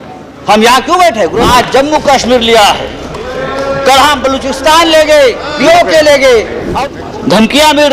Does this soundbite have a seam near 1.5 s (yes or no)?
yes